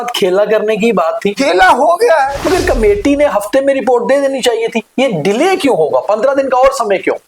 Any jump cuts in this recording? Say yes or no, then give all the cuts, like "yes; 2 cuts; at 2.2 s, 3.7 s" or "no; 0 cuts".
yes; 2 cuts; at 1.4 s, 2.4 s